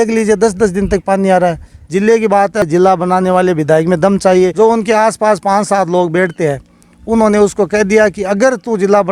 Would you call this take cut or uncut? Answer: cut